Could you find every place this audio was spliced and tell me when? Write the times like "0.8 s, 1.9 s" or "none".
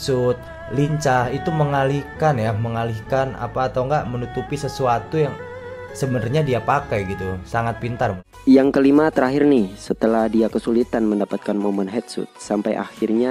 8.3 s